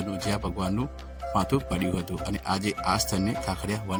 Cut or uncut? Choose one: uncut